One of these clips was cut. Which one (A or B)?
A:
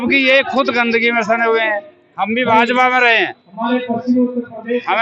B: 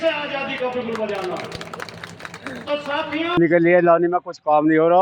B